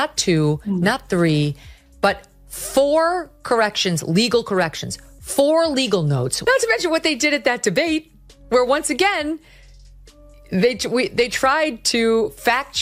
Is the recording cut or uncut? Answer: cut